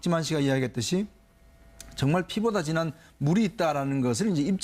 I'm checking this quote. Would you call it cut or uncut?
uncut